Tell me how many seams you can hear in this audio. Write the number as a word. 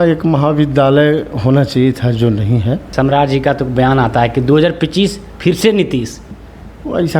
one